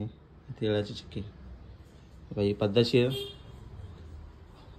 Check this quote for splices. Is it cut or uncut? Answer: uncut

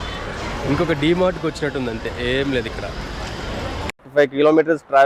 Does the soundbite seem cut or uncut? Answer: cut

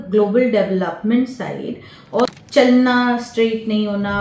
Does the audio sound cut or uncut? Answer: cut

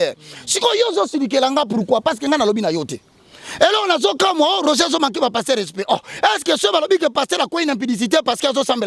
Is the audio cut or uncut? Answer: uncut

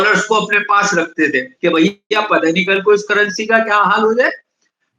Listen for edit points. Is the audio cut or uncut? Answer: cut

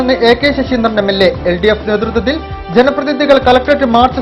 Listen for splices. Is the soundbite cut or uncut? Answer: uncut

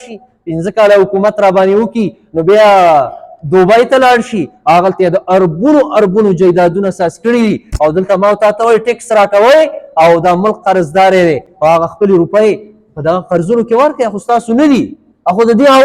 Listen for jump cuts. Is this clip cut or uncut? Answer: uncut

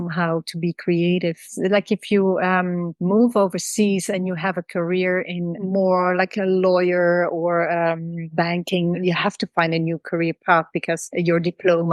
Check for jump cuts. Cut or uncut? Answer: cut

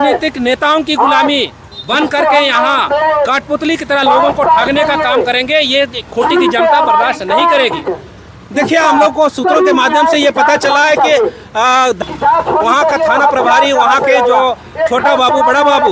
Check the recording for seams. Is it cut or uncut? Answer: cut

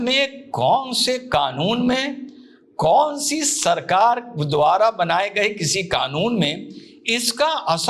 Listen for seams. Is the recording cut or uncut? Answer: uncut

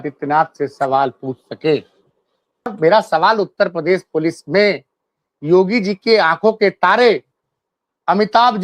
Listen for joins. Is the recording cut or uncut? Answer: cut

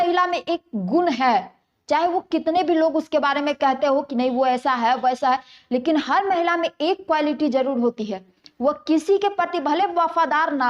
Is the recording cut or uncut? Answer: uncut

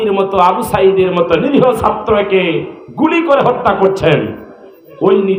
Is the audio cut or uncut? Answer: uncut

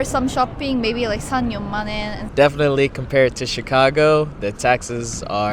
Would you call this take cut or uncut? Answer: cut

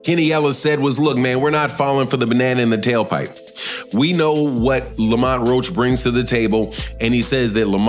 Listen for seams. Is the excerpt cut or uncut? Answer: uncut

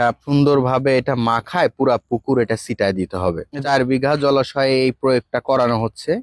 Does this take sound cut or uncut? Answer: cut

